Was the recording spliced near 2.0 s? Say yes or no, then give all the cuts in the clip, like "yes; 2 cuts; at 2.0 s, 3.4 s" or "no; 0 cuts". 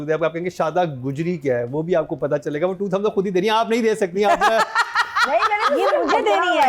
no; 0 cuts